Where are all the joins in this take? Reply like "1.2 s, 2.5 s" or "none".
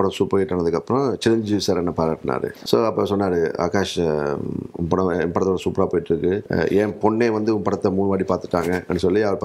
2.6 s, 6.5 s